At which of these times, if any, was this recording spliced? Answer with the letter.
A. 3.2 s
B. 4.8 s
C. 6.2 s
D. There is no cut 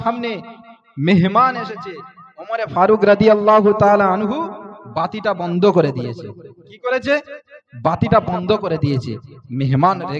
D